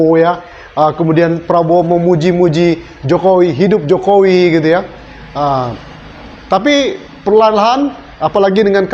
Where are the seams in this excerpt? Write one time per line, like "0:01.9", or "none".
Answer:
none